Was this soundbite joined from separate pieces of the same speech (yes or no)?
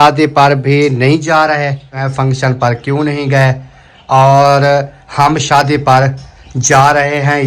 yes